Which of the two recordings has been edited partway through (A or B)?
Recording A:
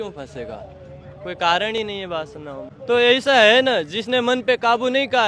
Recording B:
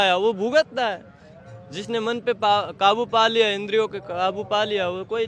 A